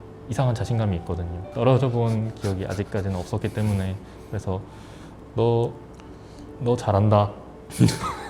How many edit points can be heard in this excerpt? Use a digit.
1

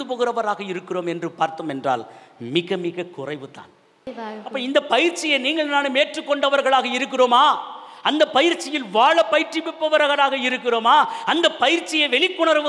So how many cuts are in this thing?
1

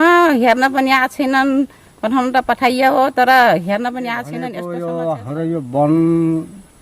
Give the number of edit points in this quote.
1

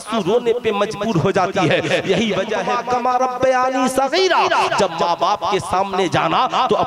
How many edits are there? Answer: 1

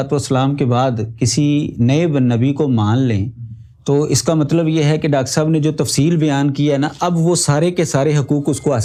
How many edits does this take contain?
0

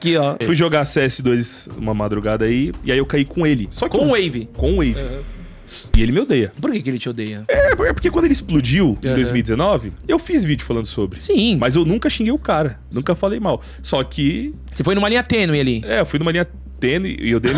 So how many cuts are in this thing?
0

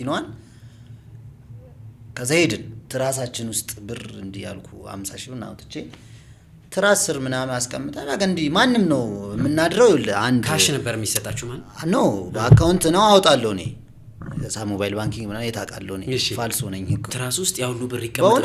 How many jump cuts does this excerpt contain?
2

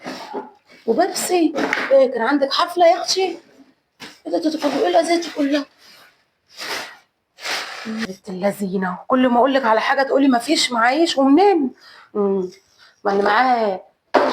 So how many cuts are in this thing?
1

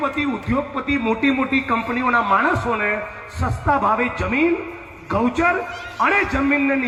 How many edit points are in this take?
0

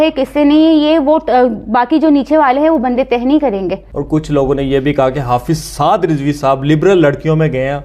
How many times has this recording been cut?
1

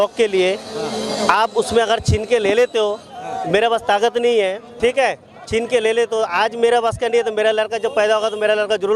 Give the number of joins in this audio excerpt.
0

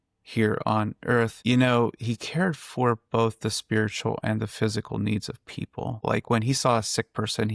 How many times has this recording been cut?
2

